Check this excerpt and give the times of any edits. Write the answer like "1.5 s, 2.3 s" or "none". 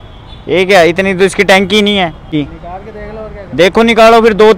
2.3 s